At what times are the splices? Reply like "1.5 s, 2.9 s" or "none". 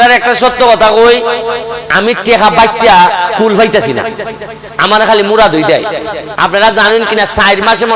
6.2 s